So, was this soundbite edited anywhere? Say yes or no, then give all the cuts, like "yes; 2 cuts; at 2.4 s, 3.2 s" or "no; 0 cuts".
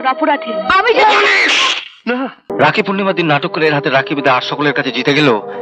yes; 1 cut; at 2.5 s